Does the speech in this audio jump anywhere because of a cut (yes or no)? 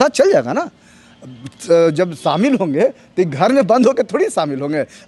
no